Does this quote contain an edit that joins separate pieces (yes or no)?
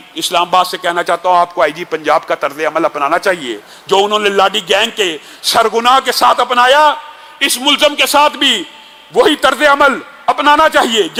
no